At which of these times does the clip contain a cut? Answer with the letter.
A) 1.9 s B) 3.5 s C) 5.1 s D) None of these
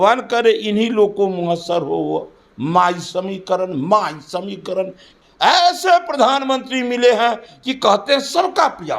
C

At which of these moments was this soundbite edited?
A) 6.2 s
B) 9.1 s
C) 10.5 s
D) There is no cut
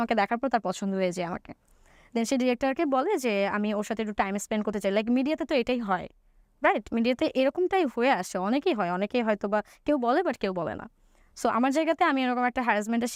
D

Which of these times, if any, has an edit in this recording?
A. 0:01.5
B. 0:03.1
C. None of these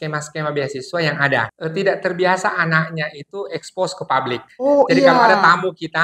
A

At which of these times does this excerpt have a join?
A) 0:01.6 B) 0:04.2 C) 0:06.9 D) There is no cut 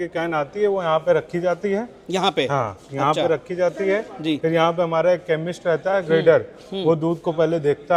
D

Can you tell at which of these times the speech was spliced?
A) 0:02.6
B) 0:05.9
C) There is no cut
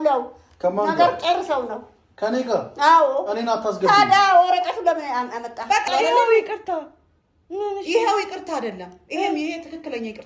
B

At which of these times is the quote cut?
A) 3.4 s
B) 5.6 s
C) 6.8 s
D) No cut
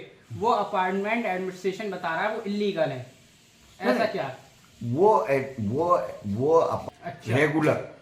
C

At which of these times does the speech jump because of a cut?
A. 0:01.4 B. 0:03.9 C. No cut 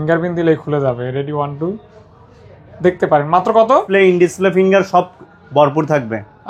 B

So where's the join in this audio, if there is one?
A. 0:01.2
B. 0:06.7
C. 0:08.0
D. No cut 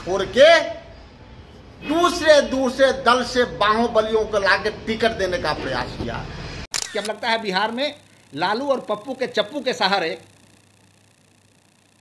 B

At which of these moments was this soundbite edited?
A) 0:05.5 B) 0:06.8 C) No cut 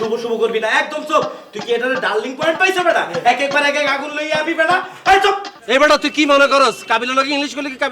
A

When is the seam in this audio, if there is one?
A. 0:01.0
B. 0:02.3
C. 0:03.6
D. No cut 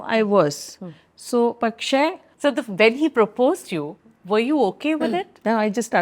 B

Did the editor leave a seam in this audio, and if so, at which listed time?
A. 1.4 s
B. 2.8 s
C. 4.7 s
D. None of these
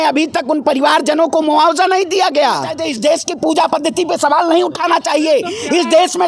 B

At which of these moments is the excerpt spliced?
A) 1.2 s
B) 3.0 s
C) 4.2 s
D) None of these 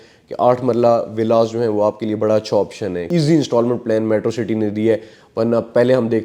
B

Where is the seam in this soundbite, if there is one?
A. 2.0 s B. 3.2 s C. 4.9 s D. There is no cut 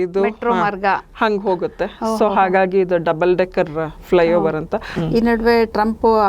C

